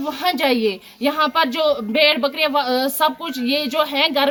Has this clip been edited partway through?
no; 0 cuts

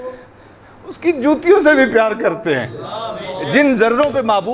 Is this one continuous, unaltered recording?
yes; 0 cuts

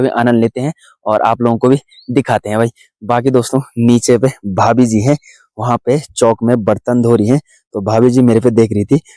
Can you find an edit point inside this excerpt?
no; 0 cuts

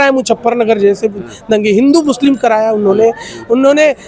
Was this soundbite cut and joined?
no; 0 cuts

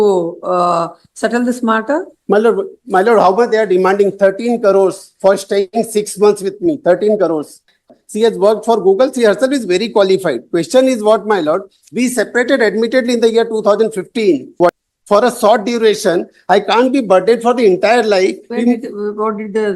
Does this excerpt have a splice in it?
yes; 2 cuts; at 8.0 s, 14.7 s

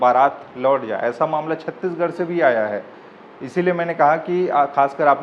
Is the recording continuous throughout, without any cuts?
yes; 0 cuts

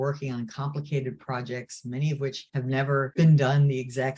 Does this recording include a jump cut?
yes; 1 cut; at 2.9 s

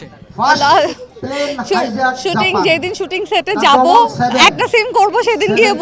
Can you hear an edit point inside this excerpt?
no; 0 cuts

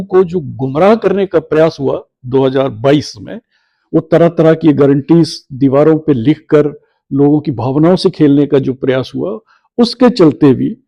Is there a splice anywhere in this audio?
no; 0 cuts

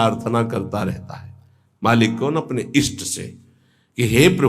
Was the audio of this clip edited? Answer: no; 0 cuts

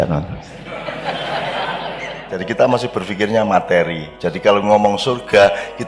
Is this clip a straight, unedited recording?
no; 1 cut; at 2.4 s

